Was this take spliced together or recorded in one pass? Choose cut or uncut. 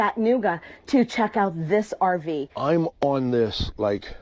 cut